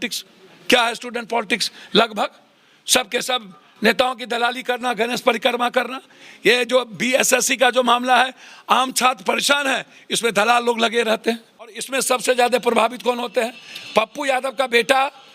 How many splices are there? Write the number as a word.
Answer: one